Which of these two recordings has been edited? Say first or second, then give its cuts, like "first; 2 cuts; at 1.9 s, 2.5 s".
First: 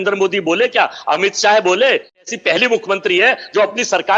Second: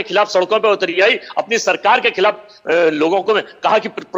first; 1 cut; at 2.2 s